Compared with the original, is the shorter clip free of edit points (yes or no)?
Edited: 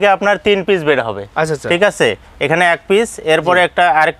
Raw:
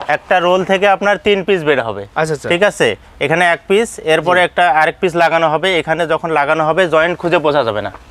yes